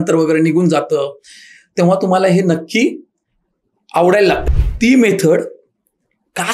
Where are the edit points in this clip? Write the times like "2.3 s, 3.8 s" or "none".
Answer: 4.4 s